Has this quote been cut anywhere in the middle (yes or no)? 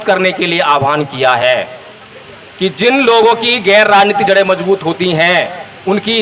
no